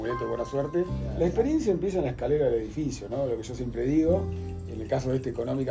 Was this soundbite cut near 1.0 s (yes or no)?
yes